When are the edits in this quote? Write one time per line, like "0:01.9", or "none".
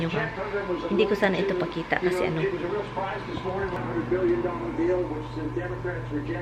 none